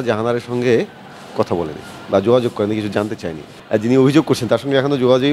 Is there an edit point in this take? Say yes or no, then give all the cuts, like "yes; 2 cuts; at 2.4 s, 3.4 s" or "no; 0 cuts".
yes; 1 cut; at 3.5 s